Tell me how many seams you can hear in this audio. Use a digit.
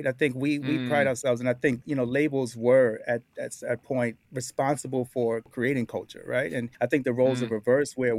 3